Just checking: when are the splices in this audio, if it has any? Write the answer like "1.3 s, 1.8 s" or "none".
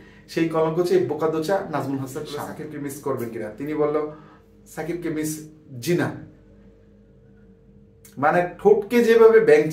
2.6 s